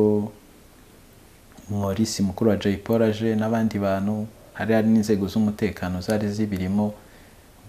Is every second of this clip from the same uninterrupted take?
yes; 0 cuts

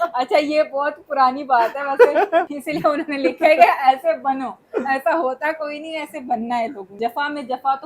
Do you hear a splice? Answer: yes; 2 cuts; at 2.5 s, 7.0 s

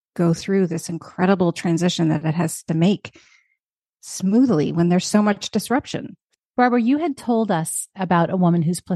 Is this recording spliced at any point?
yes; 1 cut; at 6.2 s

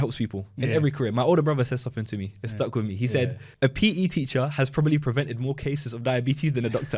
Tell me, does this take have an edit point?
yes; 1 cut; at 3.4 s

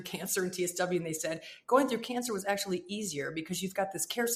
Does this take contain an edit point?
no; 0 cuts

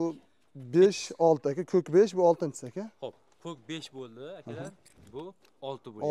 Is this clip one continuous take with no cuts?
yes; 0 cuts

